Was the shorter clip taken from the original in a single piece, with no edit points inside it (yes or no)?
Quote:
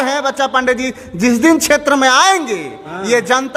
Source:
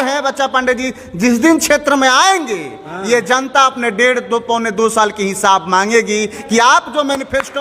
yes